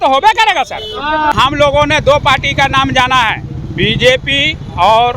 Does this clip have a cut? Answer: yes; 1 cut; at 1.3 s

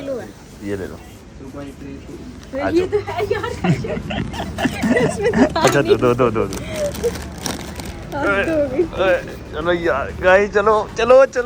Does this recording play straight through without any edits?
yes; 0 cuts

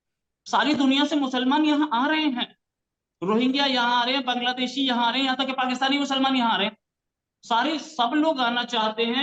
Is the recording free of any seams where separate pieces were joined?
yes; 0 cuts

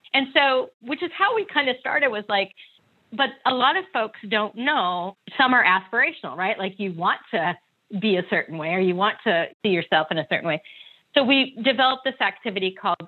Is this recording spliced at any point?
yes; 2 cuts; at 5.1 s, 9.5 s

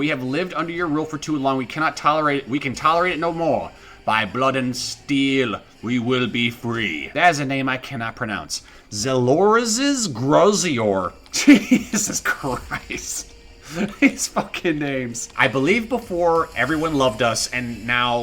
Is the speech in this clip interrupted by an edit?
yes; 2 cuts; at 7.1 s, 15.2 s

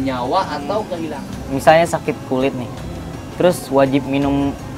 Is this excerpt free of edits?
no; 1 cut; at 1.0 s

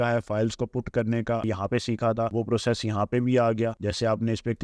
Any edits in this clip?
yes; 1 cut; at 1.4 s

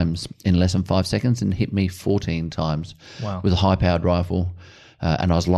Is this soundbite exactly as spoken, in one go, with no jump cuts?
yes; 0 cuts

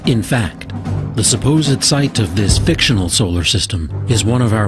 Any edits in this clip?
yes; 1 cut; at 1.8 s

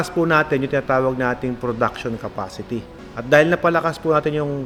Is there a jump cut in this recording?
no; 0 cuts

